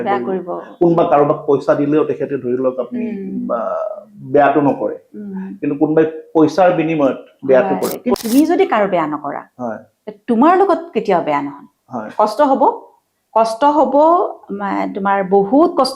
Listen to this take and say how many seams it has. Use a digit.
1